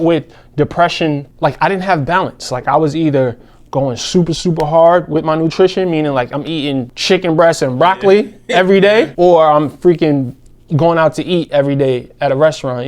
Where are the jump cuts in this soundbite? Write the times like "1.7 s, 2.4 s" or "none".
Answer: 1.3 s, 6.9 s, 9.1 s